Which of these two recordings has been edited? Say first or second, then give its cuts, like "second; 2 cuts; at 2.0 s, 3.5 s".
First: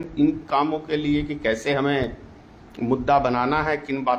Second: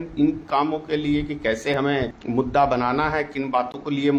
second; 1 cut; at 2.2 s